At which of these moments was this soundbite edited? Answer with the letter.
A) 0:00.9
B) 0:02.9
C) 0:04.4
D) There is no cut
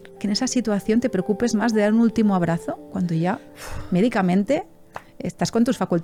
D